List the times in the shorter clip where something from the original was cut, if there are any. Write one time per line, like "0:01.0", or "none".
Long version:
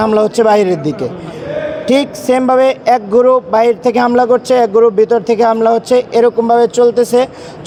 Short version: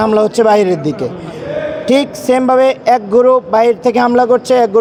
none